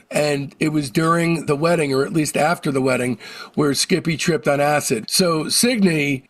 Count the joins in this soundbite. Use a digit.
1